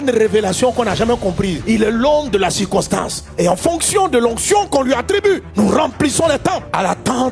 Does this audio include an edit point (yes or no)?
no